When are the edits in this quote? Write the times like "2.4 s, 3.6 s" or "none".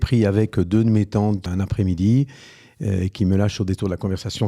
1.4 s